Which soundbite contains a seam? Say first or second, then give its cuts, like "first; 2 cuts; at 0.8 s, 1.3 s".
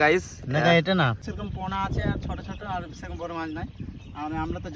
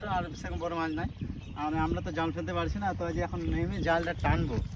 first; 1 cut; at 1.2 s